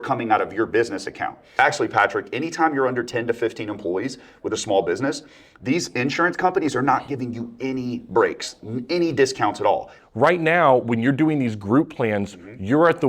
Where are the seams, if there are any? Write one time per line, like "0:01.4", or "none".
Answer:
0:01.6
0:10.0